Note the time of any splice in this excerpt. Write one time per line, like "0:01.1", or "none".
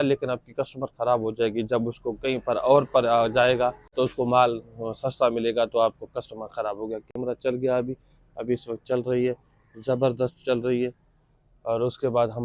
none